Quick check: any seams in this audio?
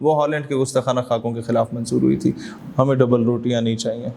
yes; 1 cut; at 2.4 s

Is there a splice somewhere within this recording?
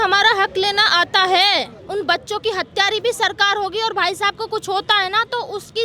yes; 1 cut; at 1.8 s

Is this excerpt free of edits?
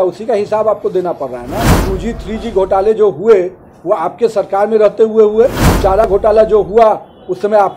no; 2 cuts; at 1.8 s, 6.1 s

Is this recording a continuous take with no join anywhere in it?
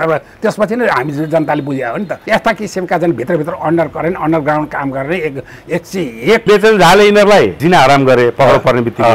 no; 2 cuts; at 2.2 s, 6.4 s

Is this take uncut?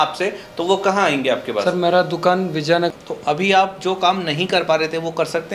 no; 1 cut; at 2.9 s

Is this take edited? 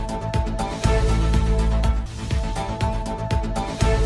yes; 1 cut; at 2.1 s

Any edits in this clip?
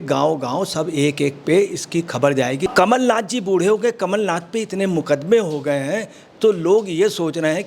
yes; 1 cut; at 2.7 s

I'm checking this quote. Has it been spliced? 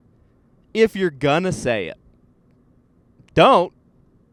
no; 0 cuts

